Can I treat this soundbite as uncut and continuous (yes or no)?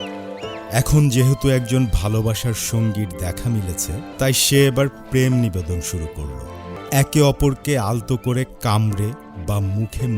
no